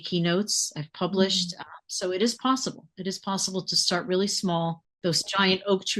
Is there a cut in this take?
yes; 1 cut; at 5.0 s

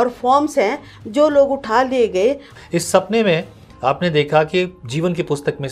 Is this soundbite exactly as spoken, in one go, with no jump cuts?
no; 1 cut; at 2.5 s

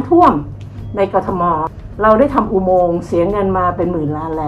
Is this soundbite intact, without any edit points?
no; 1 cut; at 1.7 s

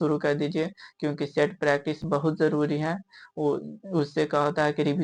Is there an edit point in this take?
no; 0 cuts

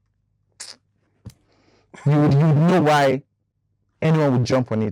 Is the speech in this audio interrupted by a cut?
no; 0 cuts

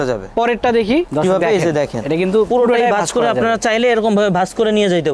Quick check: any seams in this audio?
yes; 1 cut; at 1.1 s

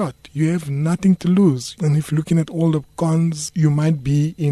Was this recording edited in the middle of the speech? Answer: yes; 1 cut; at 1.7 s

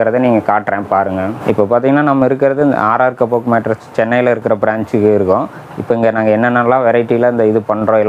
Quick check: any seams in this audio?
no; 0 cuts

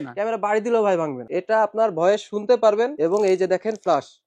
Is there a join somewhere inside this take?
yes; 2 cuts; at 1.2 s, 2.9 s

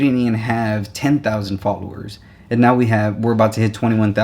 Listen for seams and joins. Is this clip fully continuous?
yes; 0 cuts

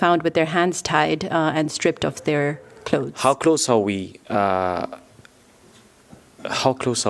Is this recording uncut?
no; 1 cut; at 3.1 s

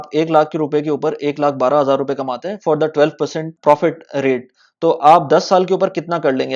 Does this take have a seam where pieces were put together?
yes; 1 cut; at 3.5 s

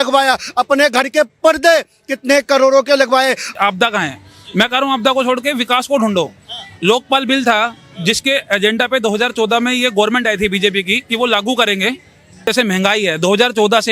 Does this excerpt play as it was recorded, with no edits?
no; 2 cuts; at 3.5 s, 12.4 s

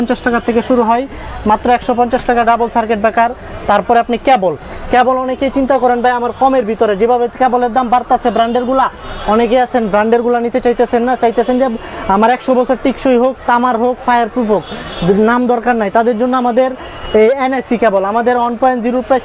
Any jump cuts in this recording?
no; 0 cuts

